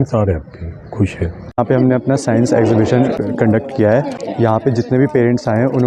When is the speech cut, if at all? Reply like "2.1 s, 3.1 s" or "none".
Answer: 1.6 s, 3.2 s, 4.2 s